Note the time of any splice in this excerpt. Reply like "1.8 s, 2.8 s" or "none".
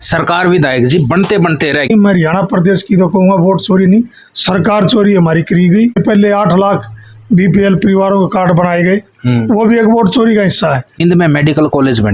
1.9 s, 6.0 s, 10.9 s